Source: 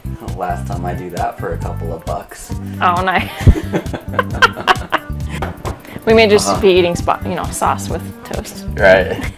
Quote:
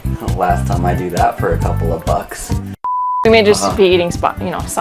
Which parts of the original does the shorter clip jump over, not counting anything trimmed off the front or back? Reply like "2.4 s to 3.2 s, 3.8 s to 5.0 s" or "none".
2.7 s to 5.5 s